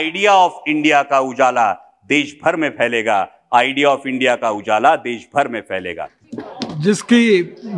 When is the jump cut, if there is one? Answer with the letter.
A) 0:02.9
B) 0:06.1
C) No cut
B